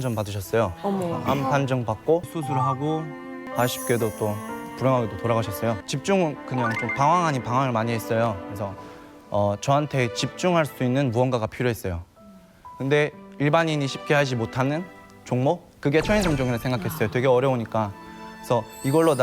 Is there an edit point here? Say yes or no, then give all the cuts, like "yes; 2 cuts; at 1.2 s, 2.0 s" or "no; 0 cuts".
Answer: yes; 3 cuts; at 2.3 s, 3.5 s, 5.9 s